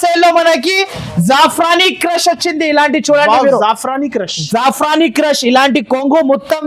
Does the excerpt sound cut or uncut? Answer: uncut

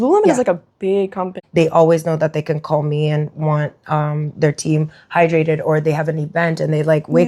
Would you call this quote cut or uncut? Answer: cut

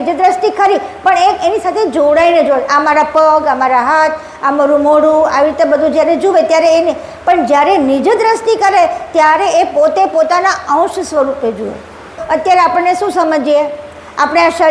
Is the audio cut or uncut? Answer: cut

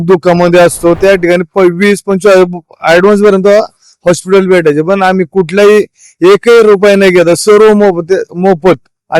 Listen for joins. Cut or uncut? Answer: cut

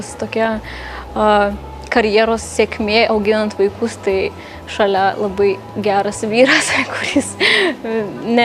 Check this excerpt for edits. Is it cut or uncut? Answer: uncut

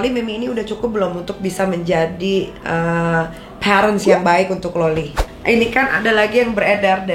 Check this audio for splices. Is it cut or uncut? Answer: cut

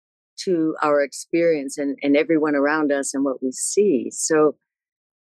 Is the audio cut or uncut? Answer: uncut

